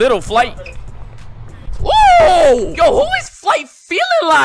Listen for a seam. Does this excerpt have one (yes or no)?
yes